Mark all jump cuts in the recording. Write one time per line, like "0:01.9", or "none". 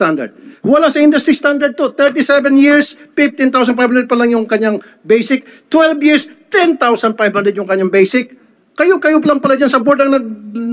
none